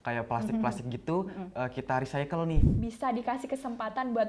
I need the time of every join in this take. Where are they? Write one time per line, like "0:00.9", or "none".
0:02.7